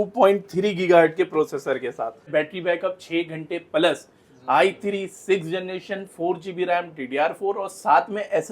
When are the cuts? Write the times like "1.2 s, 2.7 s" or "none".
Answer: 2.3 s